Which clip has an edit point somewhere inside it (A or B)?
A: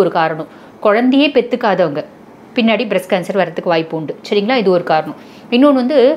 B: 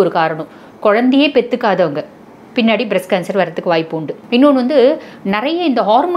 B